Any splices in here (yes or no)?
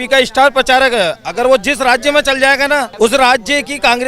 yes